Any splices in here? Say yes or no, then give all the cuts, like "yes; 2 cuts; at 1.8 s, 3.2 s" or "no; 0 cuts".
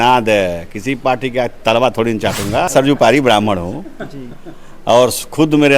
yes; 1 cut; at 2.7 s